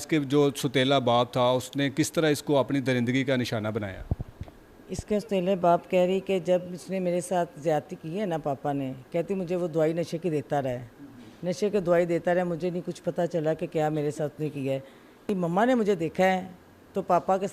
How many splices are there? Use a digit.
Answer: 1